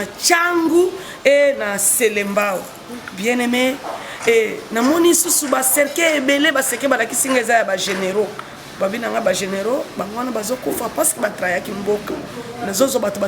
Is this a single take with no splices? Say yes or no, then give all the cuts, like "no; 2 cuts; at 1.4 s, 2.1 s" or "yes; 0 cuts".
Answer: yes; 0 cuts